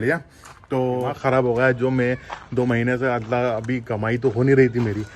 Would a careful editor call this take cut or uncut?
cut